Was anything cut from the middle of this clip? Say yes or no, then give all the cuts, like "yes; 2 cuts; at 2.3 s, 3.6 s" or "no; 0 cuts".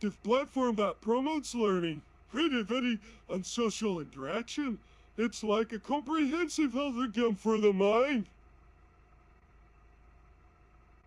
no; 0 cuts